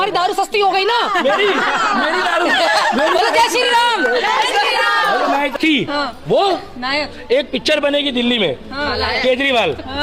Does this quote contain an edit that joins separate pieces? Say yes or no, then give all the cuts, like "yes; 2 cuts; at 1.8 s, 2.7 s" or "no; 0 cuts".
yes; 1 cut; at 5.5 s